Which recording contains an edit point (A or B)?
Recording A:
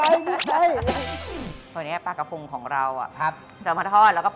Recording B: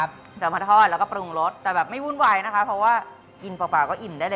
A